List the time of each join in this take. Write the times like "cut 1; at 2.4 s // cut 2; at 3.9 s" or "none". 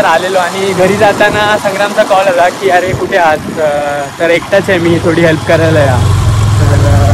none